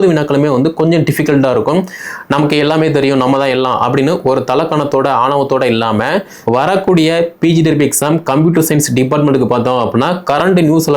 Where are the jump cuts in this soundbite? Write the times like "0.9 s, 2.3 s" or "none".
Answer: 6.3 s